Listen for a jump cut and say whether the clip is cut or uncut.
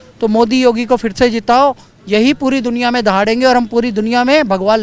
uncut